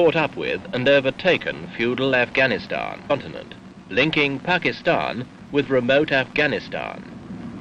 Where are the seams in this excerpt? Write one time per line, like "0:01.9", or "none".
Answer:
none